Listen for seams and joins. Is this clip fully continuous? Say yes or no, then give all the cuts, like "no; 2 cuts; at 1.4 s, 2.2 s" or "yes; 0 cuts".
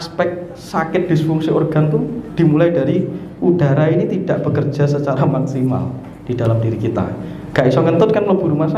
yes; 0 cuts